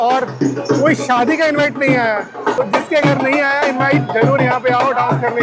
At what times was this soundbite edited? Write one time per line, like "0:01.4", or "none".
0:02.6